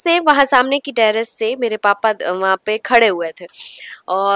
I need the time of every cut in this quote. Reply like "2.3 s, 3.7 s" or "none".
none